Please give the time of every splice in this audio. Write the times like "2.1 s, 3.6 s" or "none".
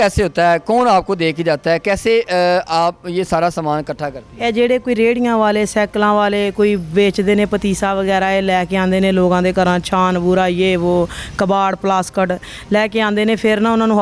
none